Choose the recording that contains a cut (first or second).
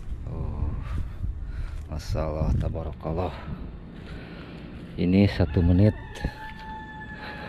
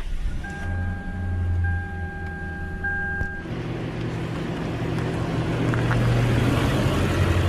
second